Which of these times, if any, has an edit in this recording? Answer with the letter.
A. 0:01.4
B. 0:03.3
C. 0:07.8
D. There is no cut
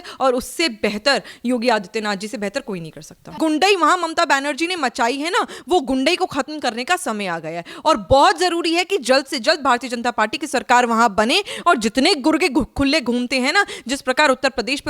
B